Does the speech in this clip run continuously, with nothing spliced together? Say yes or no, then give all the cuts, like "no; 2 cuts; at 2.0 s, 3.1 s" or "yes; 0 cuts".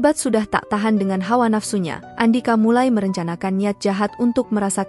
no; 1 cut; at 2.0 s